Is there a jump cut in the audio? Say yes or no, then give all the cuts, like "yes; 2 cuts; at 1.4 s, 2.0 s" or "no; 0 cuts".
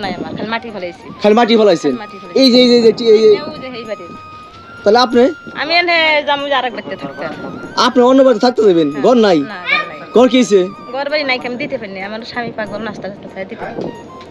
no; 0 cuts